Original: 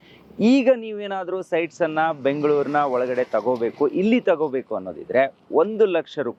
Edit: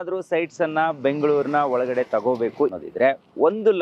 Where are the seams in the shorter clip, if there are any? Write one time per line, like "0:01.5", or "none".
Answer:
0:02.7